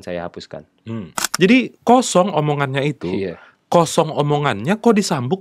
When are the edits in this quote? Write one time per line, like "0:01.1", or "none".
0:01.2

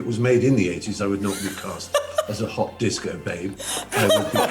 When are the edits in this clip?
none

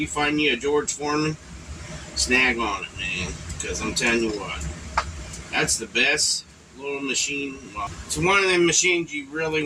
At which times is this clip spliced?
0:07.9

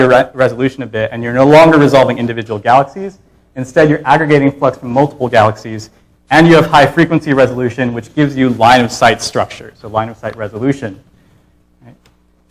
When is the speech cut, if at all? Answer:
0:04.9

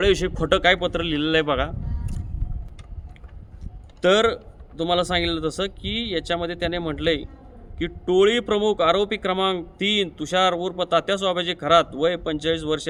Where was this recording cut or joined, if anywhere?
none

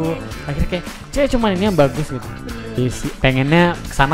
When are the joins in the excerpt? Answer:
0:02.8

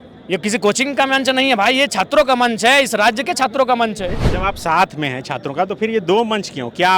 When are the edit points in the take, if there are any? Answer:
0:04.2

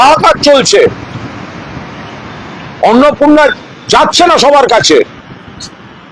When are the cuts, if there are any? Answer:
none

